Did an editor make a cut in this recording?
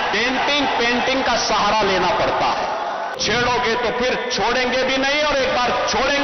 yes; 1 cut; at 3.1 s

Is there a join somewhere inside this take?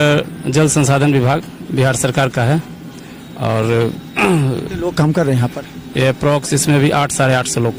no; 0 cuts

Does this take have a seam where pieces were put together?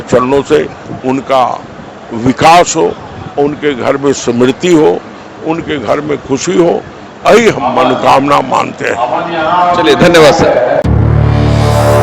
no; 0 cuts

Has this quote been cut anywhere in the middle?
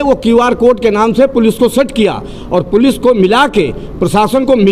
no; 0 cuts

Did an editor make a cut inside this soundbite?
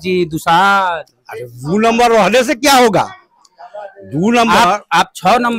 no; 0 cuts

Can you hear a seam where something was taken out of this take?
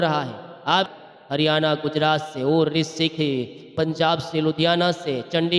yes; 2 cuts; at 0.9 s, 3.7 s

